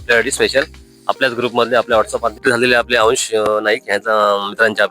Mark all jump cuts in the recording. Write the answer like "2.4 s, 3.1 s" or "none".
2.4 s